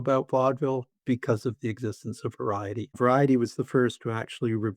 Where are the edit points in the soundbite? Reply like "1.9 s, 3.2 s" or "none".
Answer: 3.0 s

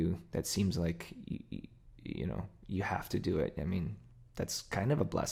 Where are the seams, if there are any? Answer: none

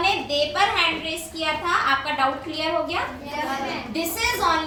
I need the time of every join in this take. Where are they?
none

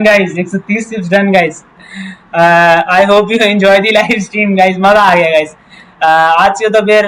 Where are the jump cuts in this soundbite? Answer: none

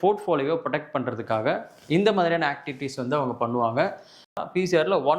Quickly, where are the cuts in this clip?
4.2 s

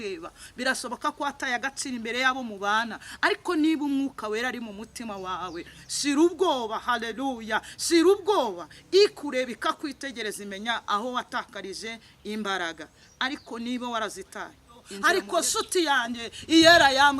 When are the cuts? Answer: 14.9 s

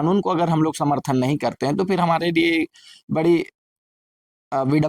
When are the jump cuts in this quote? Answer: none

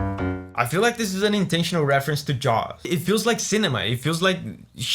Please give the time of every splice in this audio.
2.9 s

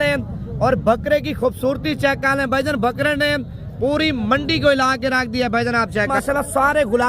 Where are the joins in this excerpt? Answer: 6.1 s

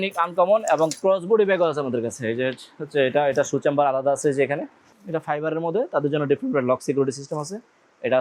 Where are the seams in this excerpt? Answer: 4.9 s

